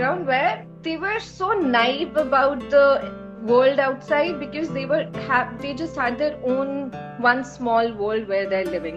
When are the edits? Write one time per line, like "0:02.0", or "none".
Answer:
none